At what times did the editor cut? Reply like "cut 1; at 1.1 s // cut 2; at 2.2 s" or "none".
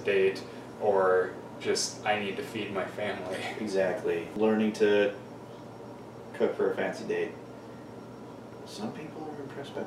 cut 1; at 4.3 s